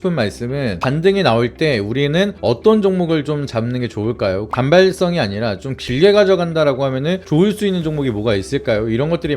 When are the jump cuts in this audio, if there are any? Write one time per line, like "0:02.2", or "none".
none